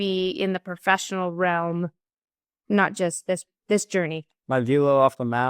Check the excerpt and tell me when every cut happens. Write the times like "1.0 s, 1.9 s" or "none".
4.4 s